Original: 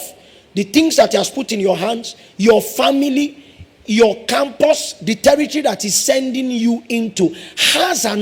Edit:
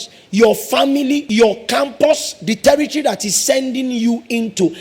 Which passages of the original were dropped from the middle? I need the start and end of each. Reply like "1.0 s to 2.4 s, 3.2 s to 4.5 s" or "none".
3.3 s to 3.9 s